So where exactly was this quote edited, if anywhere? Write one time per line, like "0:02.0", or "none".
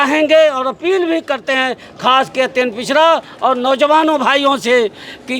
none